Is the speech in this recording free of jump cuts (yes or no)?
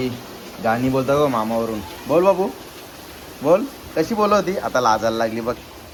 yes